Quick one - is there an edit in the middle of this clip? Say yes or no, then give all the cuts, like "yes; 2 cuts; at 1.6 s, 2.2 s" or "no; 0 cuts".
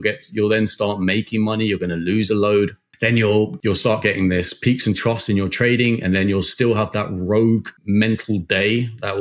yes; 3 cuts; at 2.8 s, 3.5 s, 7.7 s